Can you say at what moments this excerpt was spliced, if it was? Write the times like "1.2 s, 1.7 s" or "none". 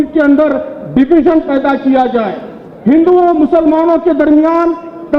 none